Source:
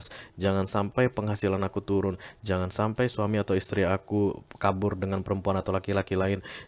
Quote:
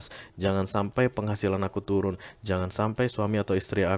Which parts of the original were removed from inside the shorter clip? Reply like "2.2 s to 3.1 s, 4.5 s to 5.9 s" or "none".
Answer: none